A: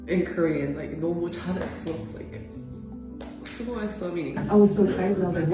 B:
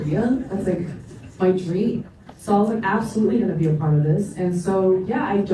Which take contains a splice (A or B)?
A